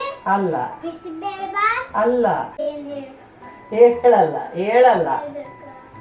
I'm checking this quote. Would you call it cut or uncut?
cut